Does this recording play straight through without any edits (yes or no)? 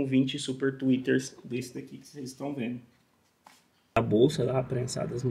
no